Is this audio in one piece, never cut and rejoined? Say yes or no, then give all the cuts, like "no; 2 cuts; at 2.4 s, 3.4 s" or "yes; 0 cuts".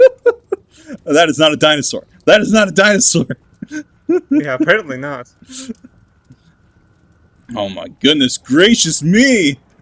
yes; 0 cuts